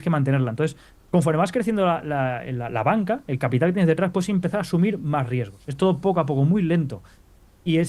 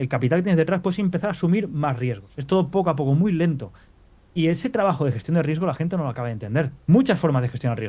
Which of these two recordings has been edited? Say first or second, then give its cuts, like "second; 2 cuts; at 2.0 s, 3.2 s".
second; 1 cut; at 6.8 s